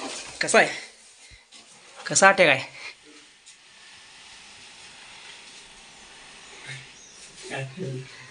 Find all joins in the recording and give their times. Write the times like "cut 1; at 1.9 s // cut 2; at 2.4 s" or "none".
none